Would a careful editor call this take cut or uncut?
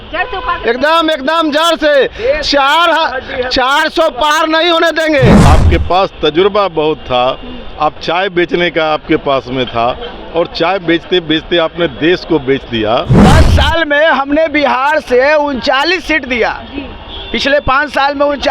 cut